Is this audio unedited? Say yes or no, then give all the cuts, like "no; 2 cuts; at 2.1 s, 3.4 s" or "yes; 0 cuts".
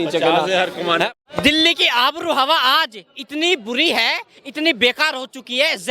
no; 1 cut; at 1.1 s